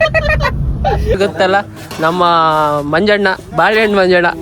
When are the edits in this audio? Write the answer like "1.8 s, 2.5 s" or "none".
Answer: 1.1 s